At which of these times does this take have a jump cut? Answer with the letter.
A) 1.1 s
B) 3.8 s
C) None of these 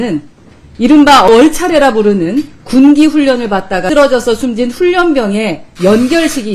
B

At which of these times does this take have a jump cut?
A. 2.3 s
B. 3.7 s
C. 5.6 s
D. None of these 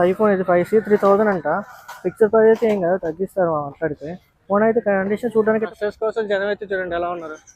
C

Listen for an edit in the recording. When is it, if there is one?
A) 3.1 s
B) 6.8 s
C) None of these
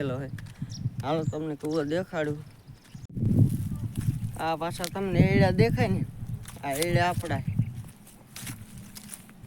A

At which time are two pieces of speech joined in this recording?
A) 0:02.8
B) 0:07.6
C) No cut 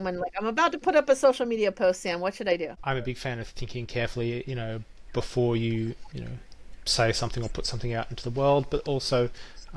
A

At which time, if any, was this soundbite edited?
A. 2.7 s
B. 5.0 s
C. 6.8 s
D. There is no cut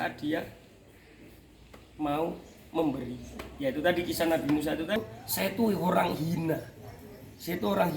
B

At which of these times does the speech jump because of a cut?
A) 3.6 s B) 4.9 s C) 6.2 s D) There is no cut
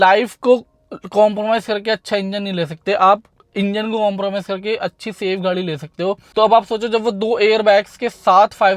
C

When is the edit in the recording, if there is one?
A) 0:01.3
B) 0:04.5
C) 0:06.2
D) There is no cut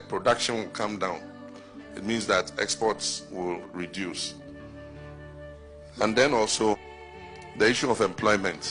B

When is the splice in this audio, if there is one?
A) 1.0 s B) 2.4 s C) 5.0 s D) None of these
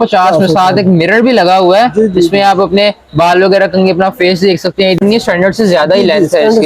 C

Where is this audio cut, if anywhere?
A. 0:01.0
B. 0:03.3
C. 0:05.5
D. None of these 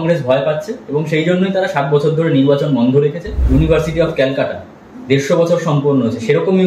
B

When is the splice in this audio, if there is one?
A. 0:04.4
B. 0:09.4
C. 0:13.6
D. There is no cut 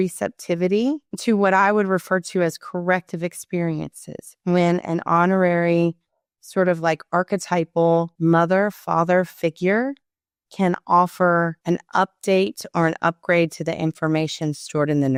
D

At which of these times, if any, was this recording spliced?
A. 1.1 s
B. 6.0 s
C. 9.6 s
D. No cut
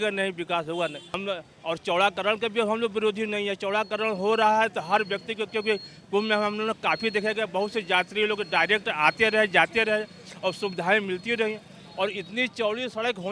D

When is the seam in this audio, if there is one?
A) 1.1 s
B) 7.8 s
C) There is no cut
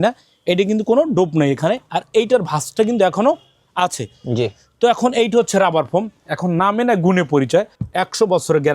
B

